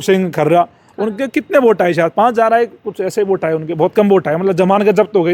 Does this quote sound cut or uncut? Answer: uncut